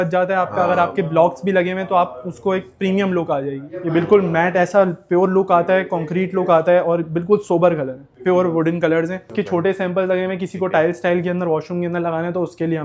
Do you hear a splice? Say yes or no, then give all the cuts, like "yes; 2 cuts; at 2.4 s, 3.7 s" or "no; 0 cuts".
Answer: yes; 3 cuts; at 3.7 s, 8.1 s, 9.3 s